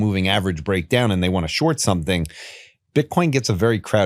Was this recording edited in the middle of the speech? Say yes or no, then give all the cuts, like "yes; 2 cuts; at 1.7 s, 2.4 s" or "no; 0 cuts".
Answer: no; 0 cuts